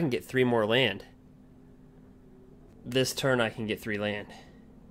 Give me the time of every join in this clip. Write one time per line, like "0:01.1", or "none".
0:02.7